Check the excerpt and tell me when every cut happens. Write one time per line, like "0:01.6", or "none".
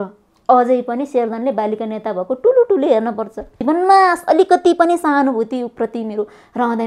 0:03.5